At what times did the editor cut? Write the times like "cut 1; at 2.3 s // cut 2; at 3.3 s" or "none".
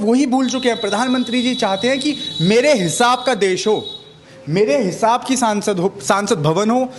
none